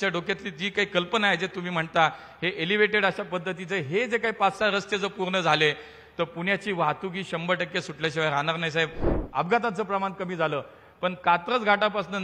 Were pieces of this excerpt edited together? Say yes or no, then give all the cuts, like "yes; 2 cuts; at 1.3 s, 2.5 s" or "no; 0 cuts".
yes; 1 cut; at 9.1 s